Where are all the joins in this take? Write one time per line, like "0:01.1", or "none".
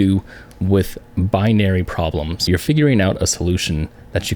0:02.4